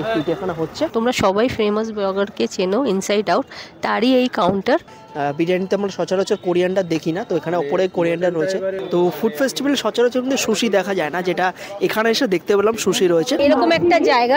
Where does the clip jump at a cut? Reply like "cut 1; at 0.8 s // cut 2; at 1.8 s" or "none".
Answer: cut 1; at 0.9 s // cut 2; at 5.0 s // cut 3; at 8.8 s // cut 4; at 13.4 s